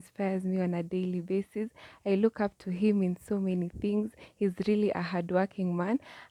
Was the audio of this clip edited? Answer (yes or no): no